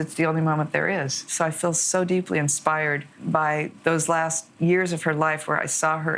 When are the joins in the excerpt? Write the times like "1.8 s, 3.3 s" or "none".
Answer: 1.3 s, 3.1 s, 4.4 s